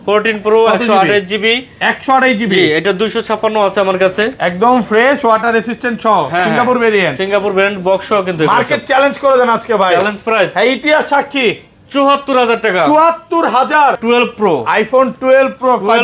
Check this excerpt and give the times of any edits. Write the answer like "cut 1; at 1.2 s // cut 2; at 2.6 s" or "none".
cut 1; at 14.0 s